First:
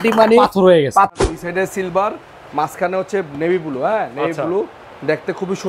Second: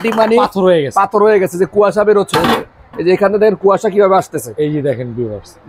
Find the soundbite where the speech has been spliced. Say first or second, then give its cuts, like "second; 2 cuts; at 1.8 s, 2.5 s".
first; 1 cut; at 1.1 s